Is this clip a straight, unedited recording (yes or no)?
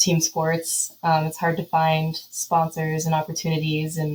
yes